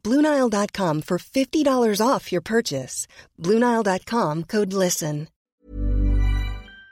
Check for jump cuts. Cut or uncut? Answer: cut